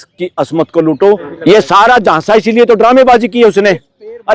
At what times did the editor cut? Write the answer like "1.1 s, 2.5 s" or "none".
1.3 s